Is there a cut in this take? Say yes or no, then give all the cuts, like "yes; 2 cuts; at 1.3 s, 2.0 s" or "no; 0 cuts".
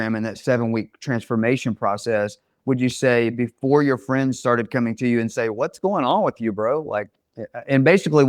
no; 0 cuts